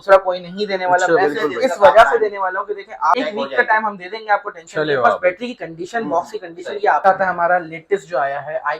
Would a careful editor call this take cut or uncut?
cut